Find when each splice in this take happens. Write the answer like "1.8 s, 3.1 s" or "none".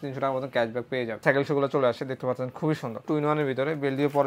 1.2 s, 3.1 s